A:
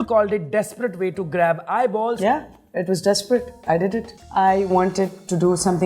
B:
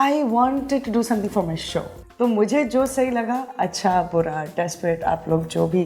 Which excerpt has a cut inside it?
A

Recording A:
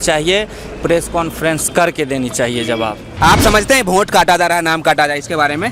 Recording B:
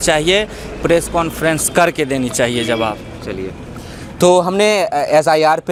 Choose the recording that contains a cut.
A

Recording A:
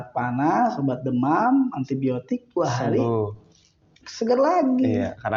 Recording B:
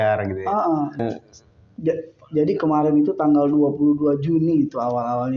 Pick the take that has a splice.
B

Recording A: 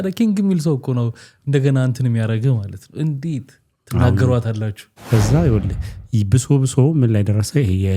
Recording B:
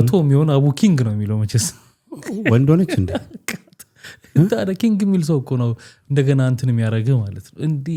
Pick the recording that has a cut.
A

